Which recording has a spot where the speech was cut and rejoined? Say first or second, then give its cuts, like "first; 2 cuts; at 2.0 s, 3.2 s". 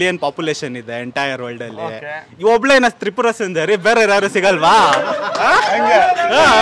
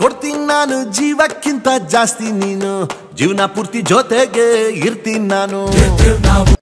first; 1 cut; at 5.6 s